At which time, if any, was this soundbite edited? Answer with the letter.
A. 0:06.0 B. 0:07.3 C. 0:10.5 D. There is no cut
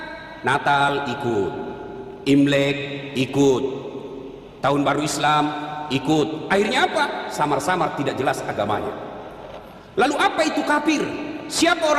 D